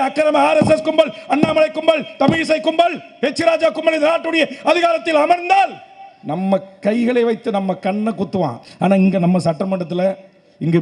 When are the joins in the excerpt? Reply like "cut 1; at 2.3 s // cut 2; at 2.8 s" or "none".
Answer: cut 1; at 8.6 s